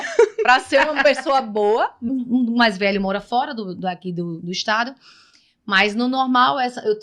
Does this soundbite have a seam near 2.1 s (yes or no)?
yes